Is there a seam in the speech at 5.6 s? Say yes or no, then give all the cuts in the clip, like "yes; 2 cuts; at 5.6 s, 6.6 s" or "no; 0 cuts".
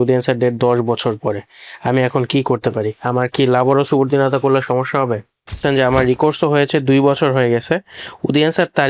yes; 1 cut; at 5.6 s